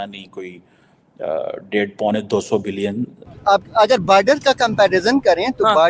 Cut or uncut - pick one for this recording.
cut